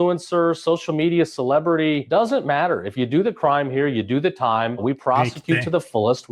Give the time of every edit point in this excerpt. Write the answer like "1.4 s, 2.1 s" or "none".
4.8 s